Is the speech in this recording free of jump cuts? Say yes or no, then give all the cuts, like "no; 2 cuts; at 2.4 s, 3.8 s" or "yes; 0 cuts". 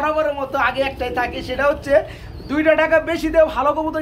yes; 0 cuts